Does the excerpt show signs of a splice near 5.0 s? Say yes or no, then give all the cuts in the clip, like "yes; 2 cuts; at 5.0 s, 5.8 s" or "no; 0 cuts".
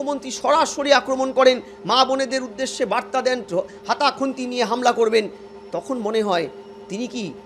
no; 0 cuts